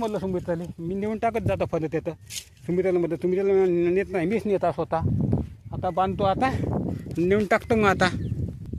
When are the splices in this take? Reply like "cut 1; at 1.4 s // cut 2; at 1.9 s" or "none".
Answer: none